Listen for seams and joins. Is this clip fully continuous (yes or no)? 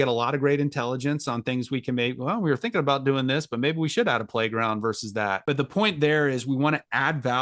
no